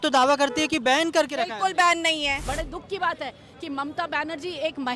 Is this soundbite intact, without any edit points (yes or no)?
no